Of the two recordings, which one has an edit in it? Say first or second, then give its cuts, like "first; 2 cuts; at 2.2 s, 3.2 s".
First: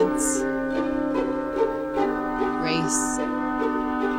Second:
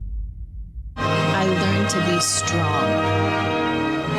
second; 1 cut; at 1.0 s